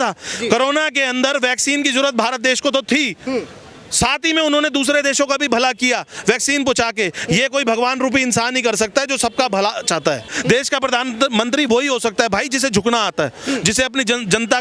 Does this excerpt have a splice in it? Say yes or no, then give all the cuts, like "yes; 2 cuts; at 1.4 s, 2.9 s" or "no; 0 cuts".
yes; 1 cut; at 10.3 s